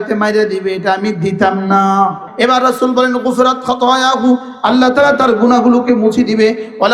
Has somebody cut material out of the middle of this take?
yes; 1 cut; at 2.3 s

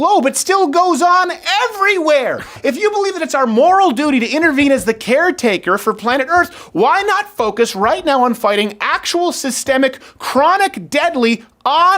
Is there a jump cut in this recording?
yes; 1 cut; at 2.5 s

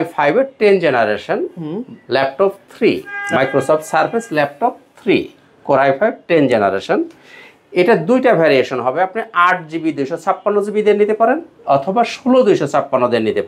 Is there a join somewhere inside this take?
no; 0 cuts

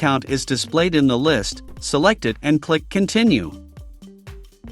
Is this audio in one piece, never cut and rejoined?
no; 1 cut; at 3.5 s

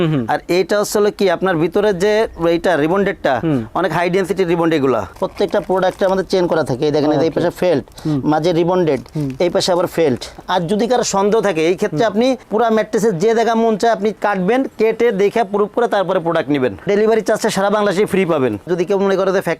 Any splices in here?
yes; 3 cuts; at 5.1 s, 10.3 s, 18.7 s

